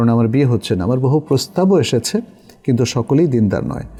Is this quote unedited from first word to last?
yes; 0 cuts

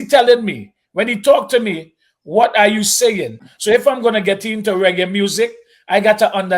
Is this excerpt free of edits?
no; 1 cut; at 3.4 s

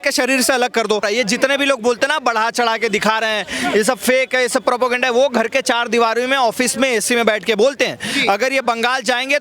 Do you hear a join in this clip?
yes; 1 cut; at 1.0 s

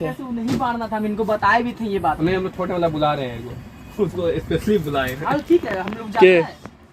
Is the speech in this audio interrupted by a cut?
yes; 1 cut; at 2.2 s

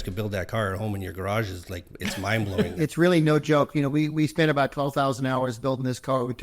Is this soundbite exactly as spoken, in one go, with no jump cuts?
no; 1 cut; at 2.7 s

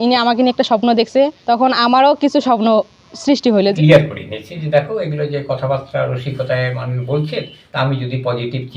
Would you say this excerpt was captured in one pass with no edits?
no; 2 cuts; at 3.7 s, 7.6 s

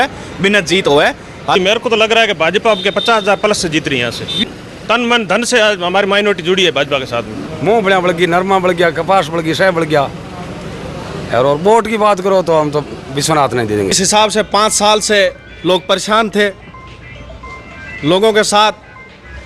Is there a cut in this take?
yes; 4 cuts; at 1.6 s, 4.4 s, 7.4 s, 13.9 s

